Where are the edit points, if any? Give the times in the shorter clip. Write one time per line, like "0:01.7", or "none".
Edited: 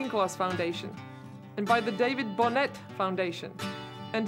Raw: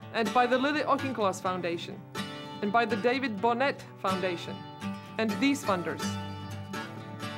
none